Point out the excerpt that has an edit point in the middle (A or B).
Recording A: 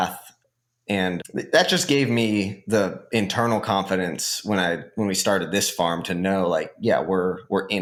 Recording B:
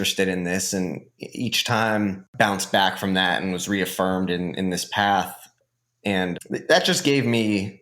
B